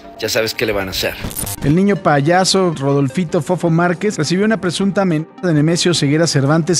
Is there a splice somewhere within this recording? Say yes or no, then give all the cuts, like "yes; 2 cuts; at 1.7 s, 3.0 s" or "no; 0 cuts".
yes; 2 cuts; at 1.2 s, 4.1 s